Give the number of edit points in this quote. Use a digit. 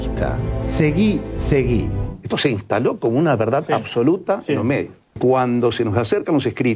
1